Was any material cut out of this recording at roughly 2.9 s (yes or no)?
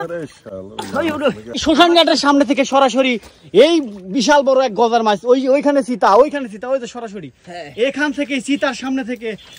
no